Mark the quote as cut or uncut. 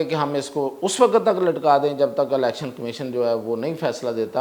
uncut